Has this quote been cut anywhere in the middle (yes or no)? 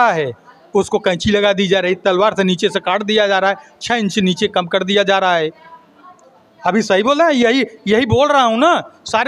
no